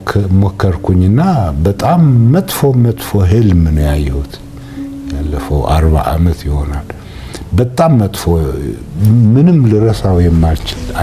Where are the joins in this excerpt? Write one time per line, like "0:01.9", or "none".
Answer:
none